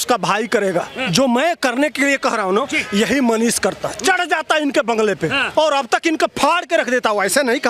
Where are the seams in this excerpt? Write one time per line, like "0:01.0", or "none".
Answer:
0:01.0
0:05.4